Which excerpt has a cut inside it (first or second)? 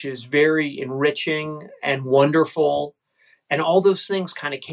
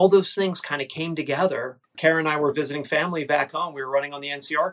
second